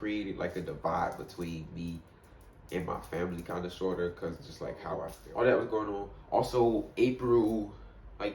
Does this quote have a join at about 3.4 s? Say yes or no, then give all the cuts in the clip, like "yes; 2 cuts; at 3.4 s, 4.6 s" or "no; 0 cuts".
no; 1 cut; at 5.1 s